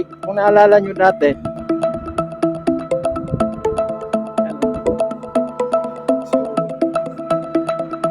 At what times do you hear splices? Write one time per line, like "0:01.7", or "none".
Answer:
0:01.5